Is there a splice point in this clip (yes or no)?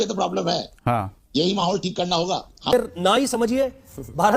yes